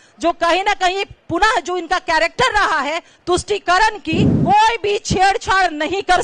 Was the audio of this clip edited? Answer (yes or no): yes